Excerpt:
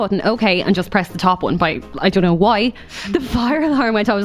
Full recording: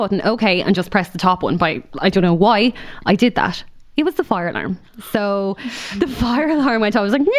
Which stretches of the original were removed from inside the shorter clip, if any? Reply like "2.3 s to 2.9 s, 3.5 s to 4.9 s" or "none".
2.9 s to 5.7 s